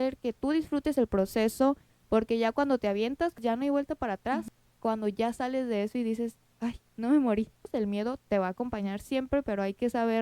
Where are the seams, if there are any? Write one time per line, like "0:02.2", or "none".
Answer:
0:01.9
0:03.4
0:04.5
0:07.6